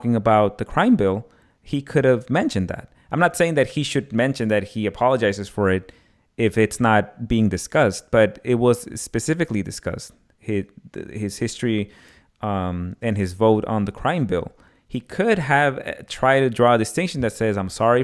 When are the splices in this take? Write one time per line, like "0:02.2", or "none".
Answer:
none